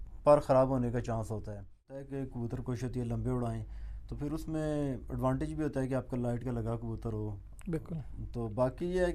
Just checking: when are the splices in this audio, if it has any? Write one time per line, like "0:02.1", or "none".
0:02.1